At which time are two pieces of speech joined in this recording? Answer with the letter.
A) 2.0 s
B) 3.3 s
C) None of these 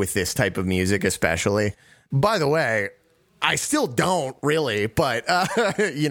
A